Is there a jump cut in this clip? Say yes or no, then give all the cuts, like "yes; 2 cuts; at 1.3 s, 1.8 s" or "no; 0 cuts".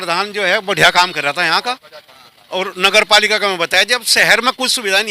no; 0 cuts